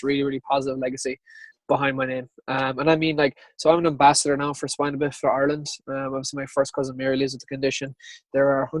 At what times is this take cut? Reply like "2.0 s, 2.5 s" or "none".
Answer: 1.5 s

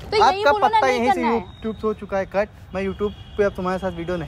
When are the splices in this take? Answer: none

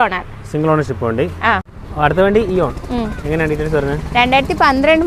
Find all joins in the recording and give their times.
1.8 s

